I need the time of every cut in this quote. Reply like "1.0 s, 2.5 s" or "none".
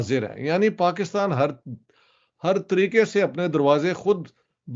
none